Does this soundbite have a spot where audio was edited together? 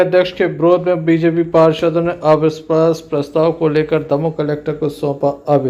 no; 0 cuts

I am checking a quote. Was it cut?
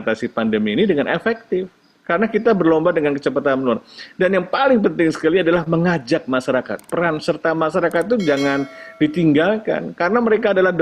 no; 0 cuts

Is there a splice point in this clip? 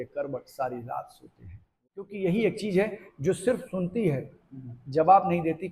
yes; 1 cut; at 2.1 s

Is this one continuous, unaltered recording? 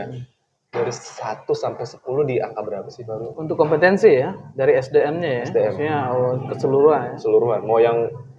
yes; 0 cuts

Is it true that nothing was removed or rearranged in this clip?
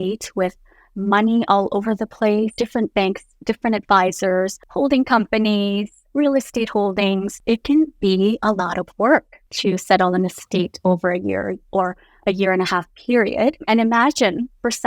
no; 5 cuts; at 2.5 s, 4.6 s, 7.3 s, 9.4 s, 13.6 s

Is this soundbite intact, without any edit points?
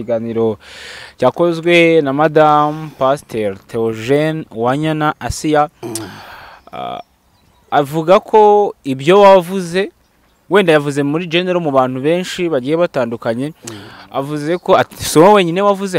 yes; 0 cuts

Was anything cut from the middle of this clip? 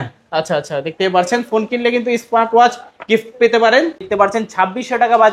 yes; 1 cut; at 4.1 s

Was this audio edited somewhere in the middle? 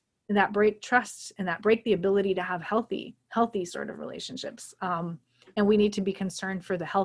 no; 0 cuts

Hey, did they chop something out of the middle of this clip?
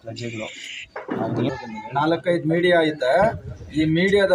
yes; 1 cut; at 1.5 s

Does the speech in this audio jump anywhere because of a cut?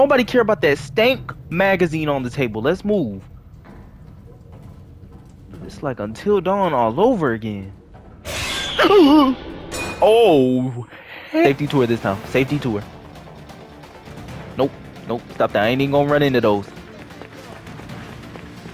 yes; 1 cut; at 11.5 s

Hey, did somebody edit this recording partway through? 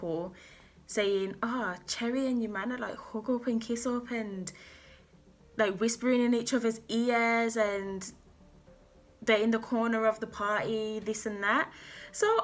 no; 0 cuts

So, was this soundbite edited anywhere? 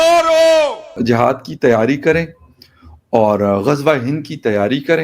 yes; 1 cut; at 1.0 s

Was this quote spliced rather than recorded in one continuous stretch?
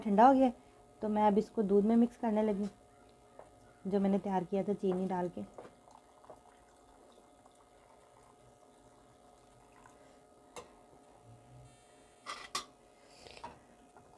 no; 0 cuts

